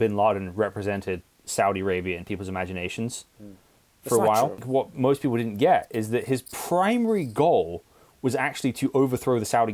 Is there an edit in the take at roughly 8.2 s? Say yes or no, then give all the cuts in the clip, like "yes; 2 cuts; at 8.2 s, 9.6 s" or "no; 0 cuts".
no; 1 cut; at 4.6 s